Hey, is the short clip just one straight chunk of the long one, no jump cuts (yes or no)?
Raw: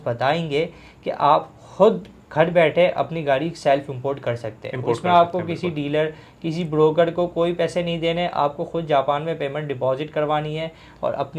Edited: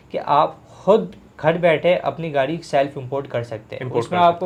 yes